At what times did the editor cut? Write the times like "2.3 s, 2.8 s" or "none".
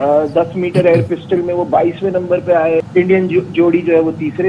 2.9 s